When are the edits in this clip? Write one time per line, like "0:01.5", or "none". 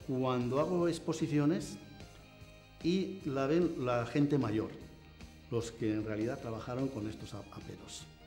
none